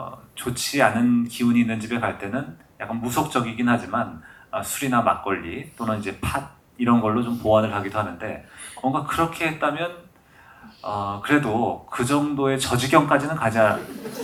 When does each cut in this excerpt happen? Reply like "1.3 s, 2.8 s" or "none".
none